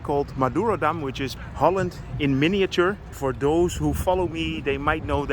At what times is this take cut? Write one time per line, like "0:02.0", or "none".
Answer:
0:01.3
0:03.1